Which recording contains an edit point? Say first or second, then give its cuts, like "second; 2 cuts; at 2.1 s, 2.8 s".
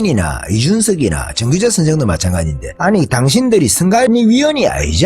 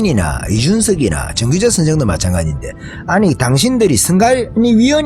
first; 2 cuts; at 2.6 s, 4.1 s